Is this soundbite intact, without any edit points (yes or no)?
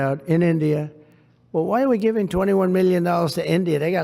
yes